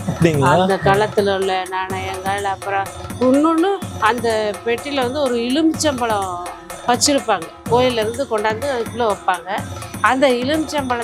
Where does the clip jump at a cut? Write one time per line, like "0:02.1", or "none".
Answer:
none